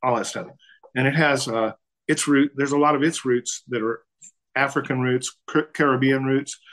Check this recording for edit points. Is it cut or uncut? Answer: cut